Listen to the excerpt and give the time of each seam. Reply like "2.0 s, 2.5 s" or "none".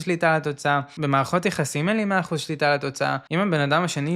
0.9 s, 3.2 s

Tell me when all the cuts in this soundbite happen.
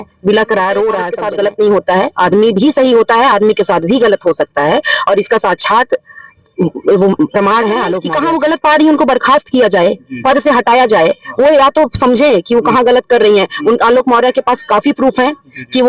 1.2 s, 8.1 s

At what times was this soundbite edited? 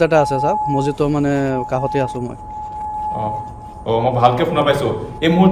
none

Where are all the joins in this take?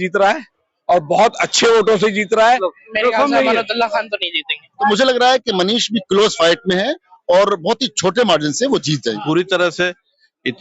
2.5 s, 4.9 s, 9.1 s

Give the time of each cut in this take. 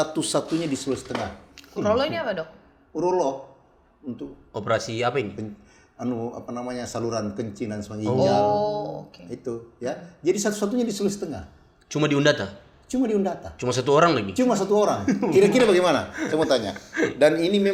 none

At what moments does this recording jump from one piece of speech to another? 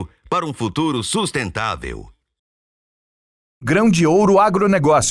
2.9 s

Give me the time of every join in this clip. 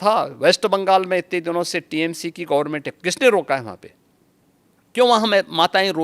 none

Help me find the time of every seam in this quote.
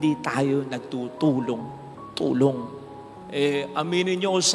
none

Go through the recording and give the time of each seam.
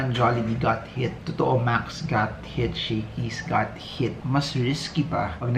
4.2 s

